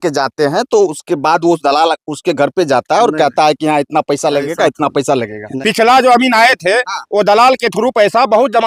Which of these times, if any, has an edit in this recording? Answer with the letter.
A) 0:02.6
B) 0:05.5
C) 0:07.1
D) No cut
B